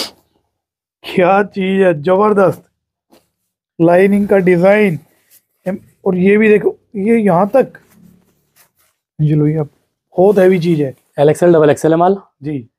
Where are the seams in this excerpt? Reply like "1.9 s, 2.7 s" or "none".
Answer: none